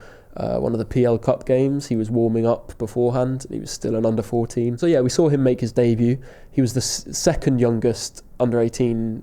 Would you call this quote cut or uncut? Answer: cut